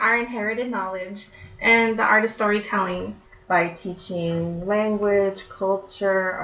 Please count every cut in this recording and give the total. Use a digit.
1